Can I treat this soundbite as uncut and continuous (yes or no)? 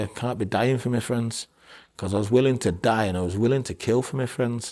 yes